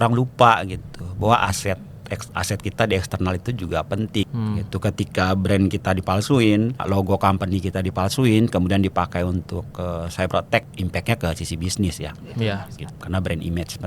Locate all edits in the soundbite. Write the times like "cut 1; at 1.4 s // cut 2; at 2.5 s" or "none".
cut 1; at 4.3 s // cut 2; at 6.8 s // cut 3; at 10.6 s // cut 4; at 12.9 s